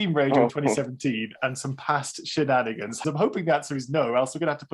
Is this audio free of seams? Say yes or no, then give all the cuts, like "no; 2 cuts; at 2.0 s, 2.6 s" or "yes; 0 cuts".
no; 1 cut; at 3.0 s